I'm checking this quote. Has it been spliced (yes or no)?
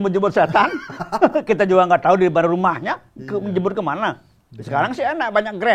no